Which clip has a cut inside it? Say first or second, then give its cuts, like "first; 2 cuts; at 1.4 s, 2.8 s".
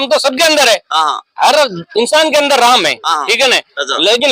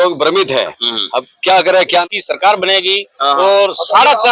second; 1 cut; at 2.0 s